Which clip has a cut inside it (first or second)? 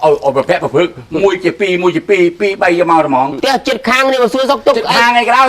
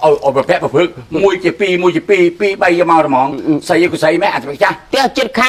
first